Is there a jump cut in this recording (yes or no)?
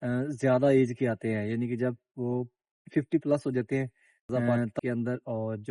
yes